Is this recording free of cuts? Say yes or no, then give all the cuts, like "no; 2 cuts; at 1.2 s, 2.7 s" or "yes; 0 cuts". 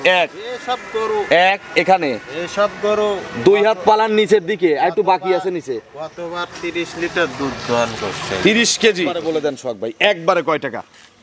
no; 1 cut; at 9.2 s